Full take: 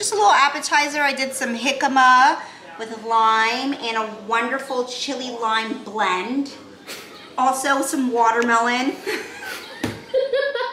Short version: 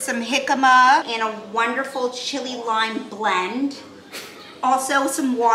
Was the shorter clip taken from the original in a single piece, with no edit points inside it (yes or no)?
no